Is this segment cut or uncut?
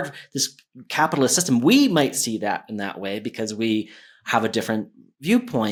uncut